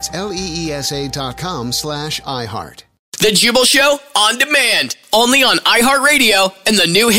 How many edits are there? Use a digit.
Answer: 1